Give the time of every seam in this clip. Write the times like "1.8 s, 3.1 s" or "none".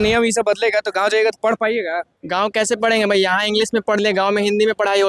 none

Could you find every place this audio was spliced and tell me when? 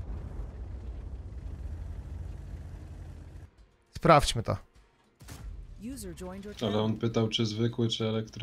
3.8 s

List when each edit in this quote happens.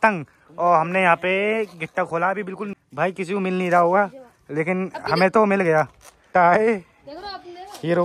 2.7 s, 6.2 s

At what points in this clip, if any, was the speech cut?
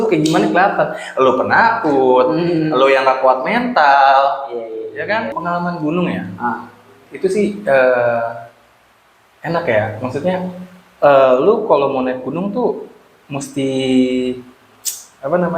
5.4 s

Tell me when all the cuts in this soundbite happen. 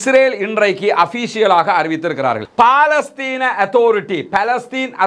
2.4 s

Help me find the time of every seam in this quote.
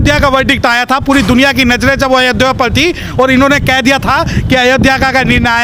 none

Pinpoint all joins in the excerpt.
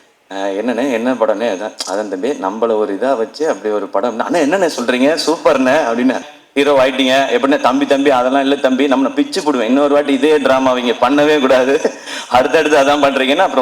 6.4 s

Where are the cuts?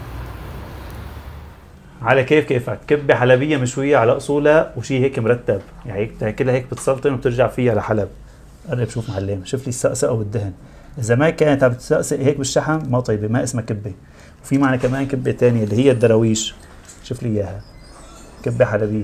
1.9 s

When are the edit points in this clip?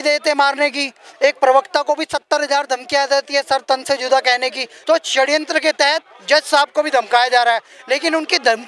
4.7 s

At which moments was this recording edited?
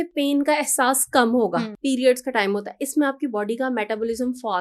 1.7 s

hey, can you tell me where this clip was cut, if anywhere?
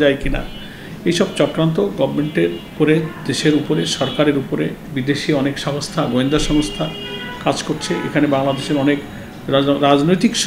2.7 s, 4.8 s

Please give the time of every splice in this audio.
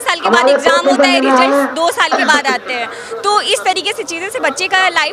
none

